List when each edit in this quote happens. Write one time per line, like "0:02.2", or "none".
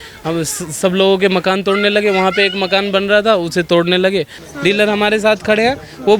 0:04.4